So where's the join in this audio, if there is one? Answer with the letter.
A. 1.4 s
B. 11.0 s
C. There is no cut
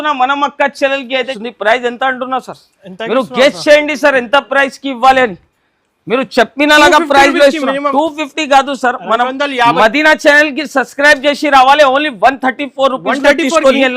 A